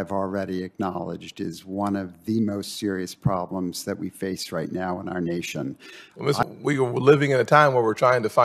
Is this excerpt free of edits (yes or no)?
no